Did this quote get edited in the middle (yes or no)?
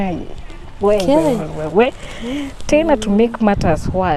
no